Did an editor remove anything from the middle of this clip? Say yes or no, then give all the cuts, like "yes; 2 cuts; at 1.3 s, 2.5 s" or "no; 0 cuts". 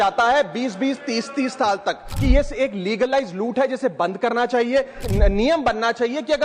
yes; 2 cuts; at 2.1 s, 5.0 s